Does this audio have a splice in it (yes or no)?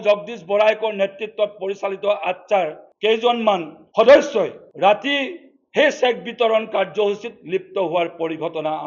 yes